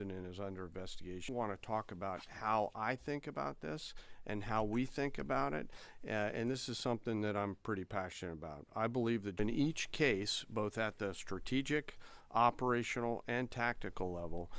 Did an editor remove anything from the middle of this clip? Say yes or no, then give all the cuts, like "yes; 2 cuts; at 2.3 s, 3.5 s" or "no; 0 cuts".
yes; 2 cuts; at 1.3 s, 9.4 s